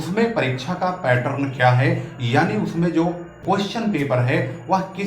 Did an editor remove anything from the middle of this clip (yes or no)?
yes